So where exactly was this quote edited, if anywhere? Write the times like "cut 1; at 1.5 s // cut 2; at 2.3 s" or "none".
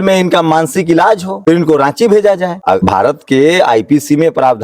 cut 1; at 1.3 s // cut 2; at 2.7 s